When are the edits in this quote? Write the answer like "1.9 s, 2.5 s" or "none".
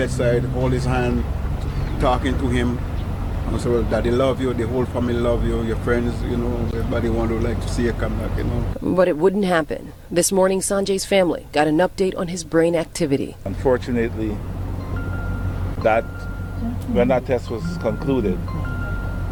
none